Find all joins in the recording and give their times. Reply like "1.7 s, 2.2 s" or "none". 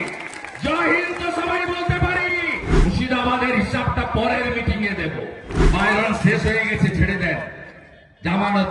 2.7 s, 5.5 s